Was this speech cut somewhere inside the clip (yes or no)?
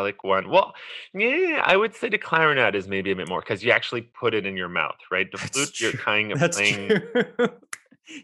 no